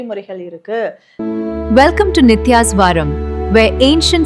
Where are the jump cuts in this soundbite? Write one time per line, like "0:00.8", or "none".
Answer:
0:01.0